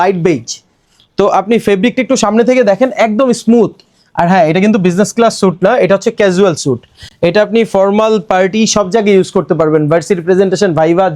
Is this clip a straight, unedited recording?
yes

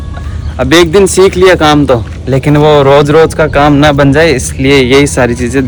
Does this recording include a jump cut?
no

